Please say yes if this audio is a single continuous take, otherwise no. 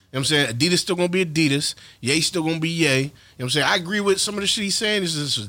yes